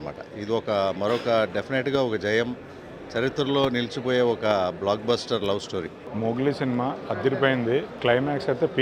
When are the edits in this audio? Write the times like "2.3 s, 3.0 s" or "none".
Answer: 6.0 s, 7.9 s